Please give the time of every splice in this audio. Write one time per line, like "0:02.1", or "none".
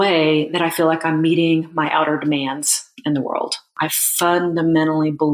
0:03.7